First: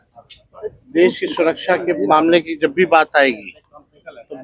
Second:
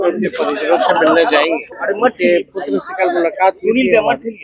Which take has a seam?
second; 1 cut; at 1.7 s

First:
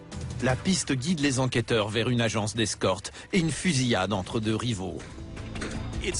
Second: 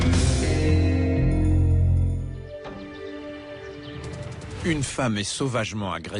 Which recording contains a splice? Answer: second; 1 cut; at 2.4 s

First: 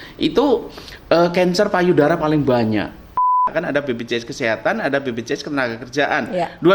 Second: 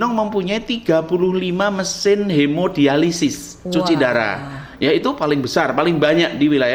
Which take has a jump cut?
first; 1 cut; at 3.3 s

